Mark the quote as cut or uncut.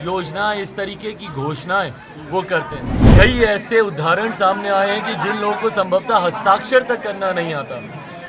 cut